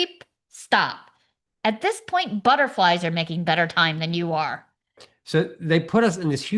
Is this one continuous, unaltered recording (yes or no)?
no